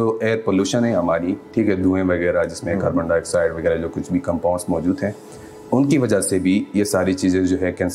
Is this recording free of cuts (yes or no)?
yes